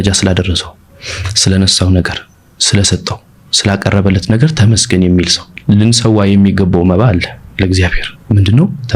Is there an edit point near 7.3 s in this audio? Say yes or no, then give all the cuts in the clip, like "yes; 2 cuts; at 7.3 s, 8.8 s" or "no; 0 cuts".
no; 1 cut; at 5.5 s